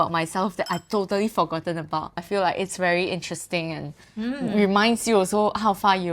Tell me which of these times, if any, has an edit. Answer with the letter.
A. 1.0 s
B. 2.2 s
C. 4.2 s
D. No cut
B